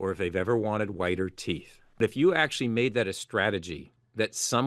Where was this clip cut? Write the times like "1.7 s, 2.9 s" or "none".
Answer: 2.0 s